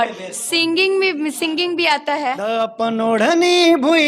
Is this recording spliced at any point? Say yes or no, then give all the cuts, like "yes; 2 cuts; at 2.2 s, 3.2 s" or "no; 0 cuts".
yes; 1 cut; at 2.4 s